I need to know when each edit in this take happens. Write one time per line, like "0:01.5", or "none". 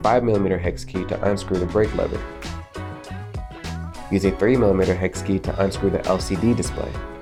none